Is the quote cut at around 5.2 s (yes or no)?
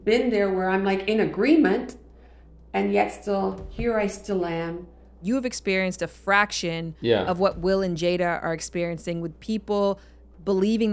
yes